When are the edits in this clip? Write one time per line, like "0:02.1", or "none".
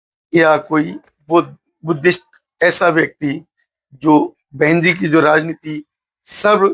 0:04.4